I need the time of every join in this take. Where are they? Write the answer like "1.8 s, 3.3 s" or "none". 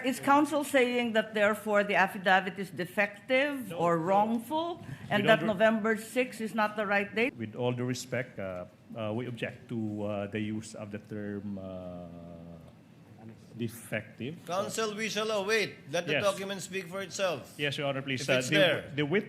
7.3 s, 8.3 s